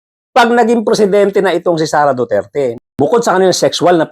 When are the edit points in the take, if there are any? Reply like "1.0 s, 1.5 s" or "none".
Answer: 2.7 s

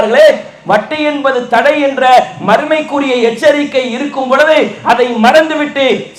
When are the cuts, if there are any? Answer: none

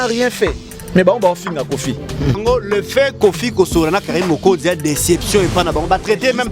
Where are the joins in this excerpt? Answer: 2.4 s

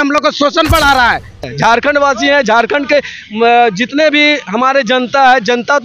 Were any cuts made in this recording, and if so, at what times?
1.5 s

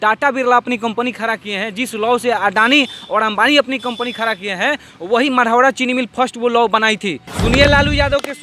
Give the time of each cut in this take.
7.3 s

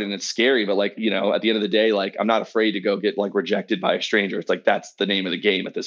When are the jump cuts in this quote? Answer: 0.9 s, 4.9 s

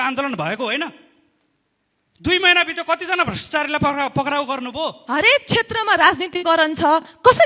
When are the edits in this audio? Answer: 5.0 s

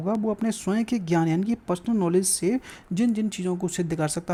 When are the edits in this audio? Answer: none

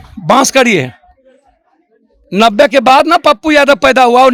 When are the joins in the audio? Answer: none

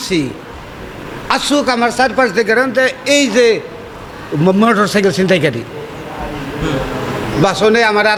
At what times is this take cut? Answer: none

